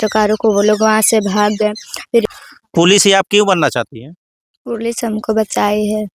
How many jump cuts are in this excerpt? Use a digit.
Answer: 1